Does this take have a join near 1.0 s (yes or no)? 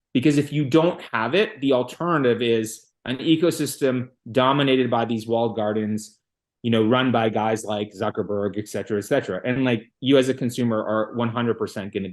no